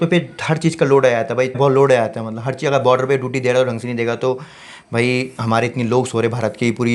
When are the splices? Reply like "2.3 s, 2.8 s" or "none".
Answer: 1.6 s

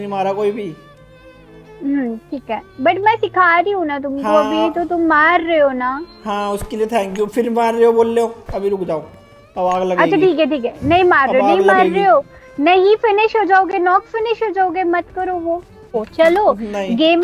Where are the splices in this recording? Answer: 16.0 s

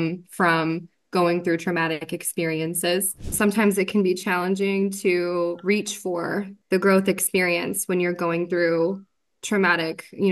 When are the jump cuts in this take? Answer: 3.3 s, 6.5 s

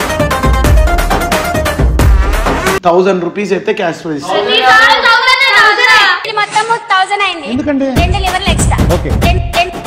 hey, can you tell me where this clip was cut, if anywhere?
2.8 s

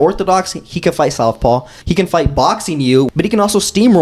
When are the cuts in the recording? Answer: 1.8 s, 3.1 s

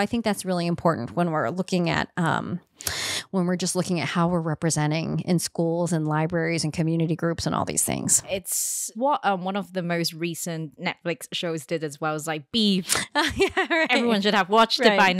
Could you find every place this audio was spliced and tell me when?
8.2 s

